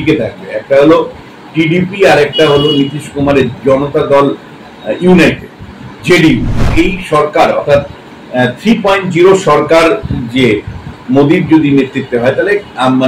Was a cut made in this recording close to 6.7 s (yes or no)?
yes